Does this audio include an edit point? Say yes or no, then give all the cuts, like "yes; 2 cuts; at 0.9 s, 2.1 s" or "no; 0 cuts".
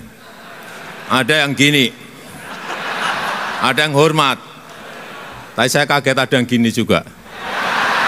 no; 0 cuts